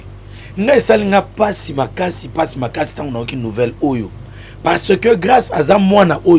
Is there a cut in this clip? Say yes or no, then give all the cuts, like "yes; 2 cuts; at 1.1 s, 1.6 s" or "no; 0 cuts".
no; 0 cuts